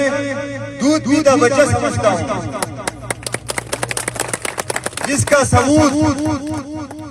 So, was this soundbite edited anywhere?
no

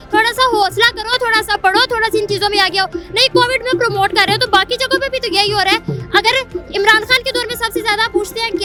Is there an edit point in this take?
no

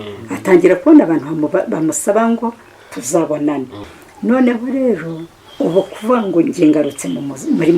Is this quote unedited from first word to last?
no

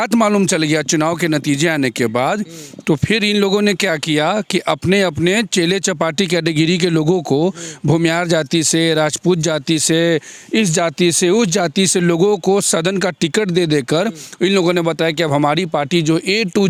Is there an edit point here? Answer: no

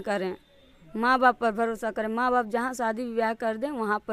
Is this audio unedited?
yes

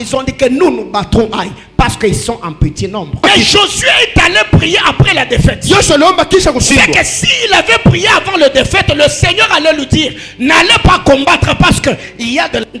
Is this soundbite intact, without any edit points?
no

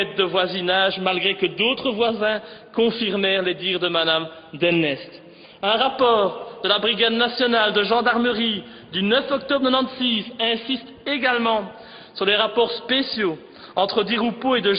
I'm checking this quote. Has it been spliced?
yes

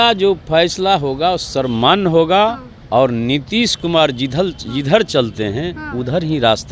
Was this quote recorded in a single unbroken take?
yes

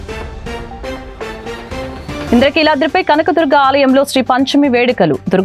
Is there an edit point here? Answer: no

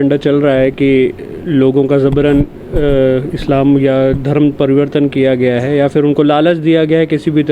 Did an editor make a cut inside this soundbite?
no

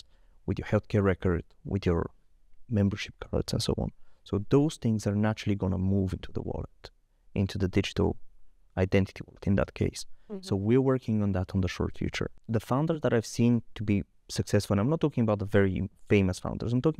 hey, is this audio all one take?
no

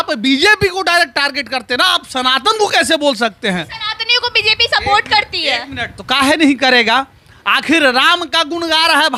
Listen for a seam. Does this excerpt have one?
no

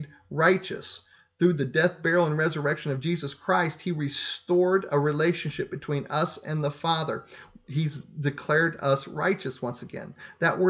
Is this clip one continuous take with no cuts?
no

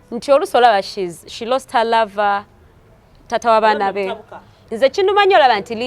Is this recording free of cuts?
no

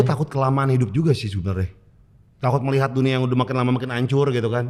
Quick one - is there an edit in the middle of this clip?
no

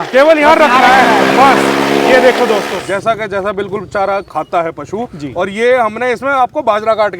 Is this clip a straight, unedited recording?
no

